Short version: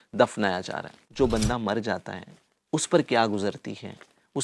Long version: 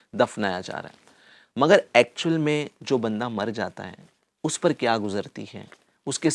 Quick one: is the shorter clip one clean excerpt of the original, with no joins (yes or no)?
no